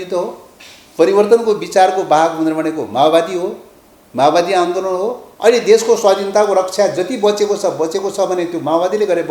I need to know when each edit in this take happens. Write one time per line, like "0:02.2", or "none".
0:05.3

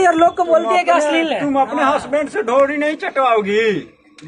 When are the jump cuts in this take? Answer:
none

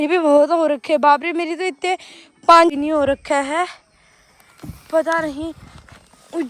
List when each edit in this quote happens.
0:02.7

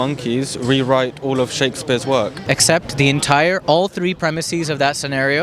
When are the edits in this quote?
0:02.4

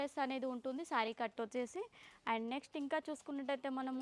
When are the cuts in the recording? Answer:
none

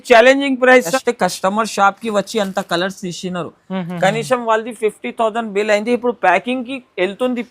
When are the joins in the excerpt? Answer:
0:00.9

